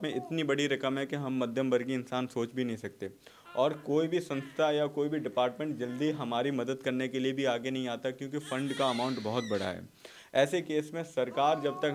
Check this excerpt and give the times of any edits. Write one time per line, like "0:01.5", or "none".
none